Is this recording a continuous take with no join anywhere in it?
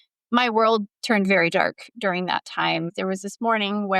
no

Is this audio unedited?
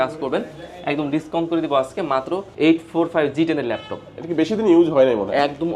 no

